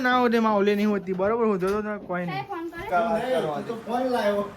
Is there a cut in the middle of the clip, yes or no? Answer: yes